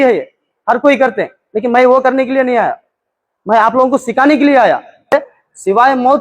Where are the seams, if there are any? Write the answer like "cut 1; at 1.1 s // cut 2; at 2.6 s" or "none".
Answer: cut 1; at 5.1 s